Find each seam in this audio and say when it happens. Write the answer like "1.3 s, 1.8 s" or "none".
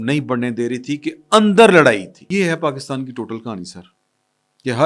2.2 s